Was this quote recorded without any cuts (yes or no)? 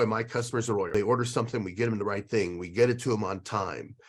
no